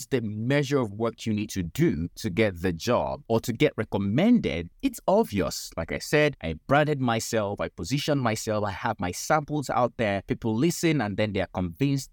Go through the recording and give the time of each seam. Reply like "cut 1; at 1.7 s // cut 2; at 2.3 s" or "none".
cut 1; at 2.2 s // cut 2; at 3.2 s // cut 3; at 4.7 s // cut 4; at 6.5 s // cut 5; at 10.3 s